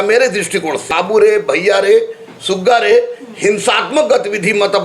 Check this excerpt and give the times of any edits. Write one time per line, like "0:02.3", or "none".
0:00.9